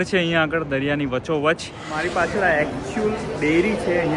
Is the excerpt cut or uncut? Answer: cut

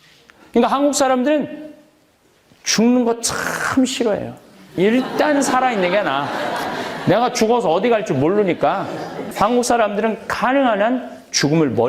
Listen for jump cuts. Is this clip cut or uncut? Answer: cut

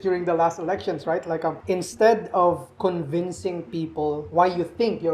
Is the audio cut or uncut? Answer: cut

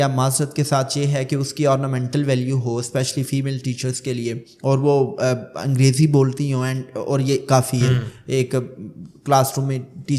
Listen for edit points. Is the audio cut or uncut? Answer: uncut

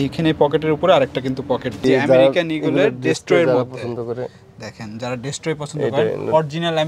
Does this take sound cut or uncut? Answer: cut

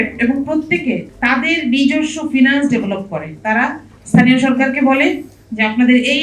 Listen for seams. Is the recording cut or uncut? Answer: cut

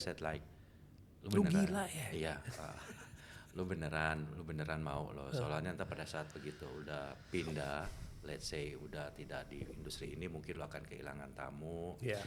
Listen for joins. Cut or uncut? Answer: uncut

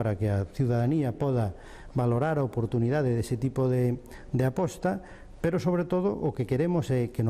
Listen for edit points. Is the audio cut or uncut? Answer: cut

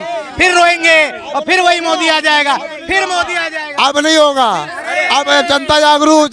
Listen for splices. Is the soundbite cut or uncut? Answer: uncut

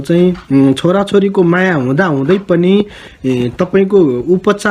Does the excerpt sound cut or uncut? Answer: uncut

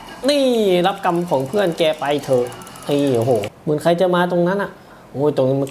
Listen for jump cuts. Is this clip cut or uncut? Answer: cut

